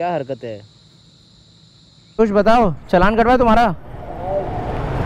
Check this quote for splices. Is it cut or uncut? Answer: cut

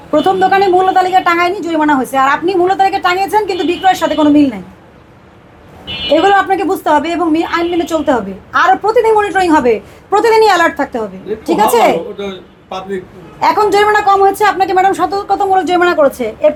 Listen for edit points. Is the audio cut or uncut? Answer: uncut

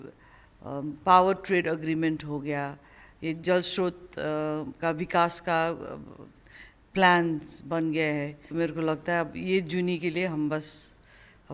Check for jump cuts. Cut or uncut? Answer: cut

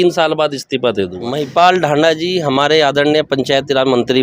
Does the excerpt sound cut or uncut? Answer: cut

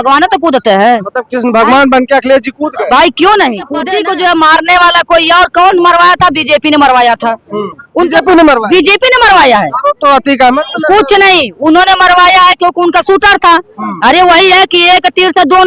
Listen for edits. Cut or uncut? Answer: cut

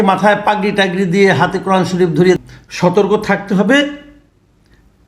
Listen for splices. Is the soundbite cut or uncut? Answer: cut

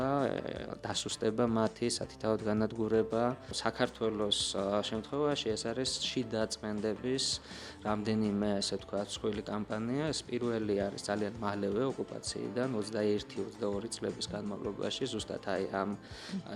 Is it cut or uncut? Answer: cut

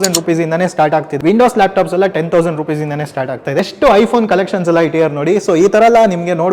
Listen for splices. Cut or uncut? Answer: cut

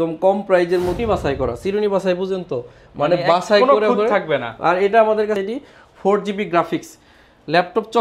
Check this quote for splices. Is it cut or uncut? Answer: cut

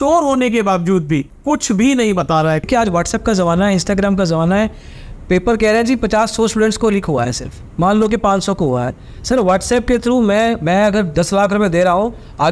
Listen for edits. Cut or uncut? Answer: cut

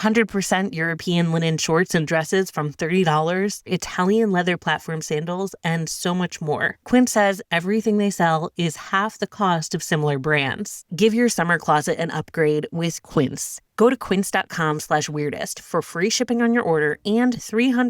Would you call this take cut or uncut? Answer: cut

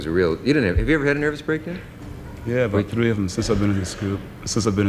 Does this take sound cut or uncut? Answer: uncut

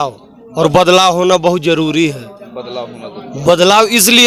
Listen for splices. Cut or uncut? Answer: uncut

